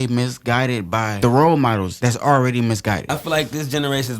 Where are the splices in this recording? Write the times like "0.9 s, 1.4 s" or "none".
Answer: 1.1 s, 1.9 s, 3.1 s